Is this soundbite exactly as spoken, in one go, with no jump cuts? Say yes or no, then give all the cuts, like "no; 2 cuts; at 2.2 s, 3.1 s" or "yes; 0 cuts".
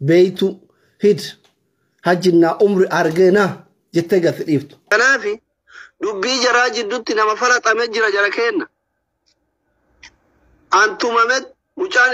no; 1 cut; at 4.9 s